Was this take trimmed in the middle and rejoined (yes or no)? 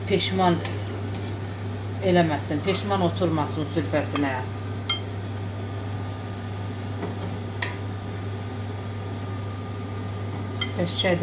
no